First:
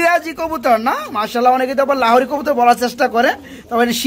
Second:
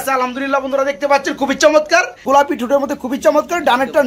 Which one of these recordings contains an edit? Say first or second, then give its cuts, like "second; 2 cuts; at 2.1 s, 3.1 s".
second; 1 cut; at 2.2 s